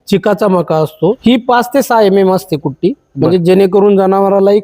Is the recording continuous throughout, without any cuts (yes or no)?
no